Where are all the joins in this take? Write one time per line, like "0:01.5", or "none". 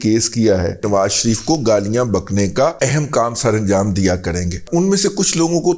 0:00.8
0:02.8
0:04.6

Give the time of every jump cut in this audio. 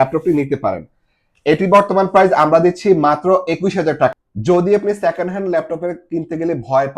0:04.1

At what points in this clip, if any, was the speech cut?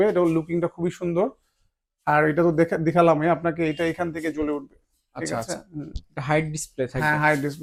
none

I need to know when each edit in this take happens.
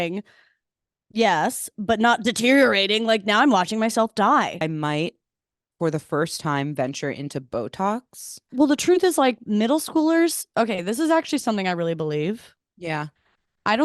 0:04.6
0:08.4

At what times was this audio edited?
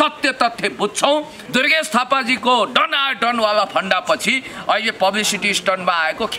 0:01.4

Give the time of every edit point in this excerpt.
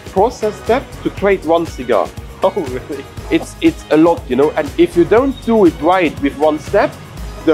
0:00.9
0:04.6

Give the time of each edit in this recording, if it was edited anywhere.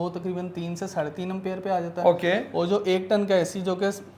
none

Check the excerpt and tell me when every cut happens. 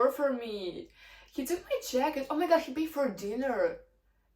none

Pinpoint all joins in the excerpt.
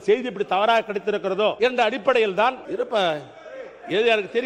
0:01.6
0:02.6

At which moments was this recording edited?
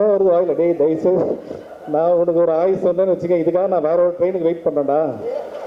none

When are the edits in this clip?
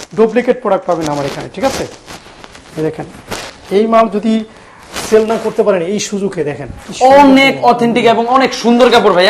none

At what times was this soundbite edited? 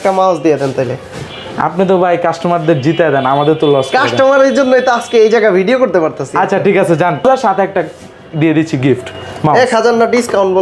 none

